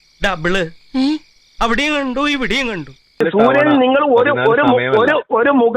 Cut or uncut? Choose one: cut